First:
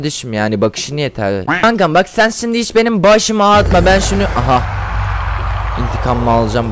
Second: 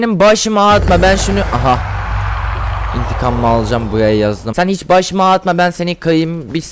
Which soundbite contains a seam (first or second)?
first